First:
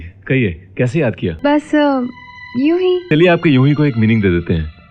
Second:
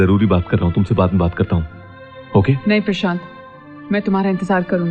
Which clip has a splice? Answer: first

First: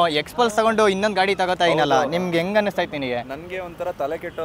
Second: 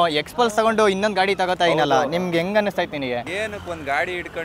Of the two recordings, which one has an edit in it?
second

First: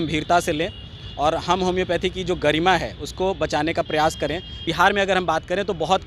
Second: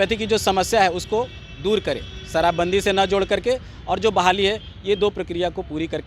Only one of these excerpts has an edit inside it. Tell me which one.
first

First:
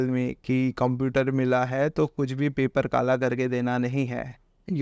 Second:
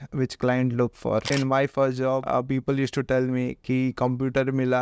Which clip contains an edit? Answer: second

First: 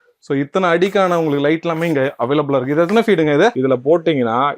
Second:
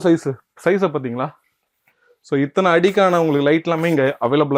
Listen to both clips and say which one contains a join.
first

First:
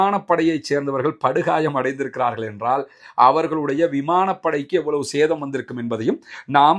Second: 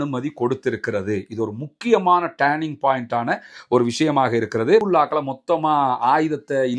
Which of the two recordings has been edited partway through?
second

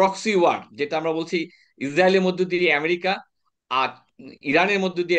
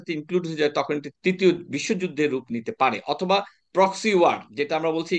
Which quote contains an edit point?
second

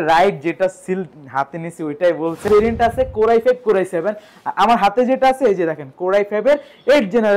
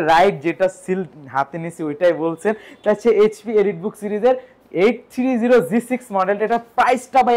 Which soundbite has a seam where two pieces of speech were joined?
first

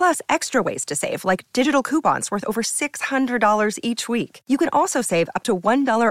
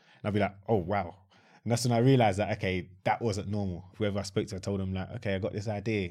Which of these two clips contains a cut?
second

